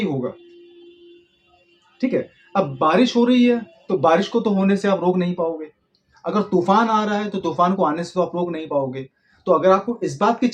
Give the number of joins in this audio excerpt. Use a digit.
0